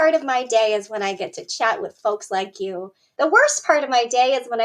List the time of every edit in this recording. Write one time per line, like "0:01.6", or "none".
none